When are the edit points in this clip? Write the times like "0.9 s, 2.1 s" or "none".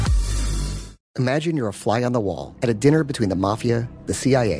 1.0 s